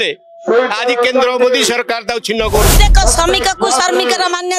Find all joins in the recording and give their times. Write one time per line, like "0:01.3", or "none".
0:02.7